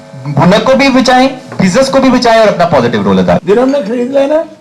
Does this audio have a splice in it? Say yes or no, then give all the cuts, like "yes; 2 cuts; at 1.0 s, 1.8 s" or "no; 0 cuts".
yes; 1 cut; at 3.4 s